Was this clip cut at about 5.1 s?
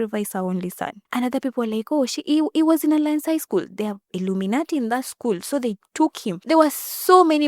no; 2 cuts; at 0.9 s, 6.3 s

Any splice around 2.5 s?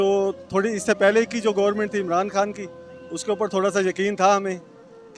no; 0 cuts

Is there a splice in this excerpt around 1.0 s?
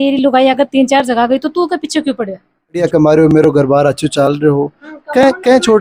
no; 1 cut; at 2.8 s

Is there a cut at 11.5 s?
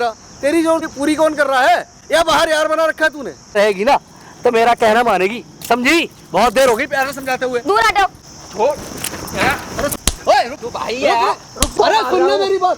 yes; 5 cuts; at 0.9 s, 3.5 s, 8.3 s, 10.1 s, 11.5 s

